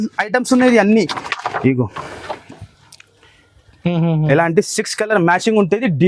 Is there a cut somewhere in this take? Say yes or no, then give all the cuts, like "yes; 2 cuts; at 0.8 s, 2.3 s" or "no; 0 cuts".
no; 0 cuts